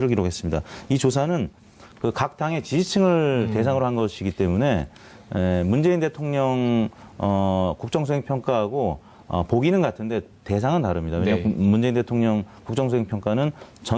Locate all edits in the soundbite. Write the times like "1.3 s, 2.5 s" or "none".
12.3 s